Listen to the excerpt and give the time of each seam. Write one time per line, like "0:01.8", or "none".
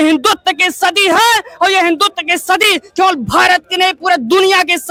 none